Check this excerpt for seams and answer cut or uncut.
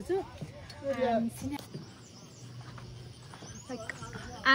cut